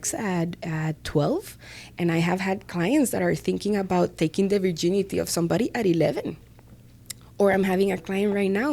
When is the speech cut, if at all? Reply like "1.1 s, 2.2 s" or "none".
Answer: none